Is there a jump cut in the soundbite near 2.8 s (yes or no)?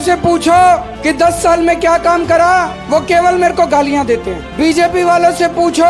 yes